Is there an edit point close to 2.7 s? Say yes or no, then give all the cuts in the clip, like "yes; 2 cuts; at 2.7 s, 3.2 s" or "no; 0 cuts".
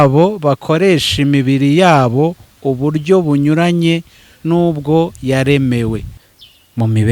no; 1 cut; at 6.1 s